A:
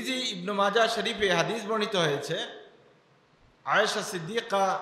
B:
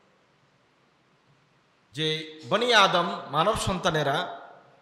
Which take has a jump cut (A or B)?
B